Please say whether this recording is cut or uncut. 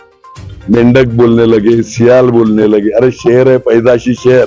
uncut